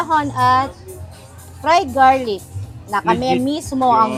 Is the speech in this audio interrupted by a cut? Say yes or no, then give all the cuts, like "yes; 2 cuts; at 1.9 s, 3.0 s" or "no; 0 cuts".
no; 0 cuts